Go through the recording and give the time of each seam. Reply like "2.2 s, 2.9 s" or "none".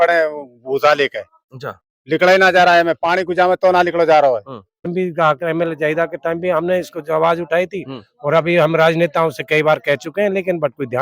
4.9 s